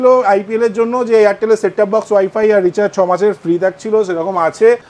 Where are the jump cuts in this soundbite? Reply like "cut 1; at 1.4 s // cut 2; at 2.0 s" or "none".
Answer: none